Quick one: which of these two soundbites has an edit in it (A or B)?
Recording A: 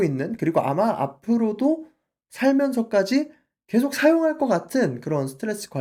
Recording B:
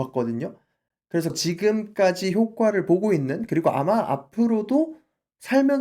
B